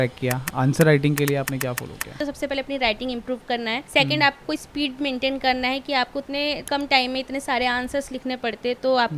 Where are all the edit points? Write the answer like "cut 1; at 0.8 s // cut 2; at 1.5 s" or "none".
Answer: cut 1; at 2.2 s // cut 2; at 3.8 s // cut 3; at 6.6 s